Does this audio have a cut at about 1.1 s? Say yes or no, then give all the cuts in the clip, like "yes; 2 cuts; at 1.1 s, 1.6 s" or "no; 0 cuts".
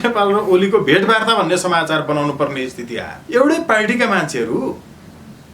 no; 1 cut; at 3.1 s